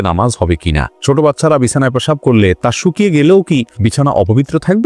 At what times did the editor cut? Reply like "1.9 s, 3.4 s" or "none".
1.0 s, 3.7 s